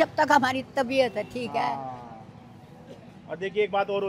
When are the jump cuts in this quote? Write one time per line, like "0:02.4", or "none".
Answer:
none

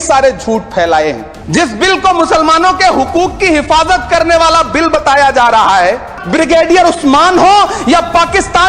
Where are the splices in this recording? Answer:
0:01.3
0:06.1

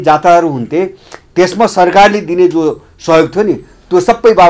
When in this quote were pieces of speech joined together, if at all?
none

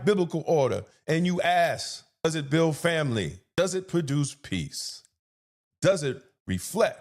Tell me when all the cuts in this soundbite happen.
0:02.2
0:03.4

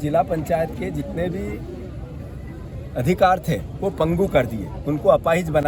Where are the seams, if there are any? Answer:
none

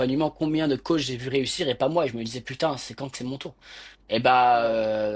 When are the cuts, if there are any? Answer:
none

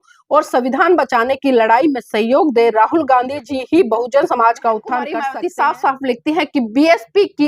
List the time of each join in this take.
0:05.2

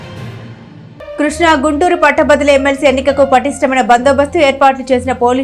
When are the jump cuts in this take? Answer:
0:01.1

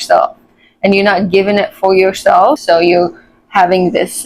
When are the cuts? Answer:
0:02.6

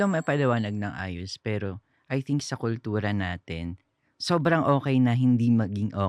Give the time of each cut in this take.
none

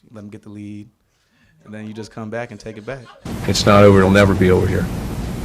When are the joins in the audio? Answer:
0:03.2

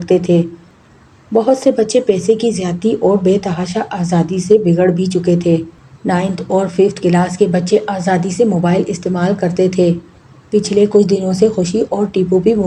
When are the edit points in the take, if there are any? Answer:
none

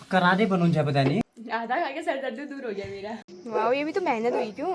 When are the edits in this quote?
0:01.2
0:03.4

